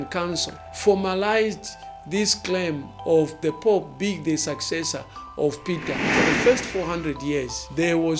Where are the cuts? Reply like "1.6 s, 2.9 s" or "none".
6.0 s